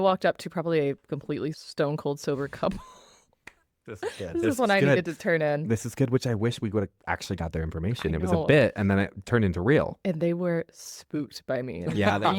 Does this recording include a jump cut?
yes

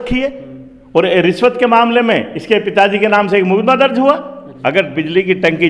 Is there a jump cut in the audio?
yes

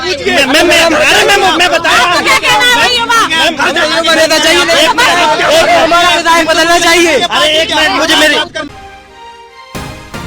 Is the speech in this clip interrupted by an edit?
yes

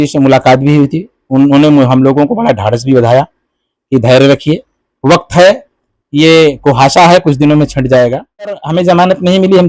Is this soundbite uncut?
no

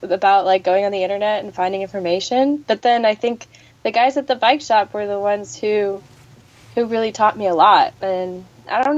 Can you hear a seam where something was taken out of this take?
no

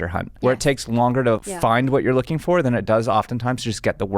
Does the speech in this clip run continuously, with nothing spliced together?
no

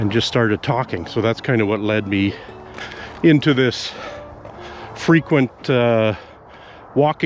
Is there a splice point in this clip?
no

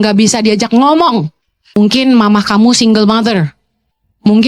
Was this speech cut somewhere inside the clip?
yes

